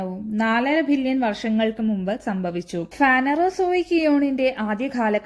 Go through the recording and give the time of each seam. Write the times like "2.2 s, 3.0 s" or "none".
2.9 s